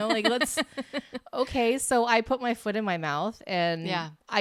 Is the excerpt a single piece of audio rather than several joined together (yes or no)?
yes